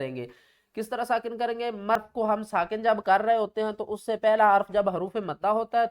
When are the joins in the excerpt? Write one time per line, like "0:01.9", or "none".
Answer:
0:02.0